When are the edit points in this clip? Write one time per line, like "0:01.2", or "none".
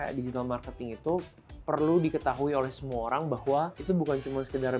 0:03.8